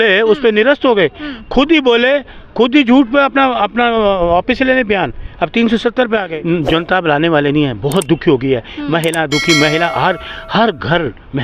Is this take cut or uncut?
cut